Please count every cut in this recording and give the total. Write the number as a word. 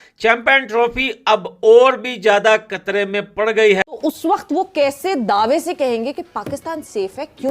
one